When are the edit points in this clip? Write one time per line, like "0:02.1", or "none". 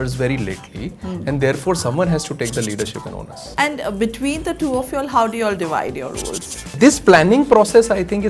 0:03.4
0:06.7